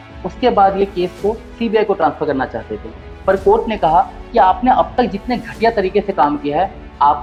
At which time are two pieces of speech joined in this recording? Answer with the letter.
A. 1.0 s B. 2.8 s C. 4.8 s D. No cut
D